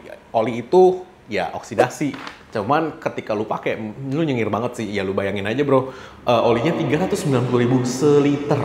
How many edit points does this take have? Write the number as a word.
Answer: zero